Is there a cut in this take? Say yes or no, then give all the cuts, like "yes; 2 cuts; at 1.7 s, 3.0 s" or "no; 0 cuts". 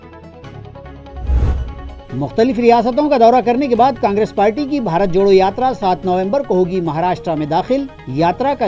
yes; 1 cut; at 1.7 s